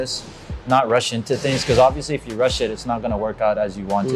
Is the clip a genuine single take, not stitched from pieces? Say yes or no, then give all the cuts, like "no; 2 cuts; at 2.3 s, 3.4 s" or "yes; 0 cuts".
yes; 0 cuts